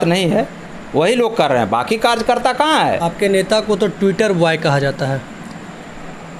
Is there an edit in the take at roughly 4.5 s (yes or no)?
no